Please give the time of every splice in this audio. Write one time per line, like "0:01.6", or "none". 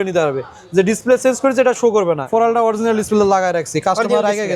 0:02.2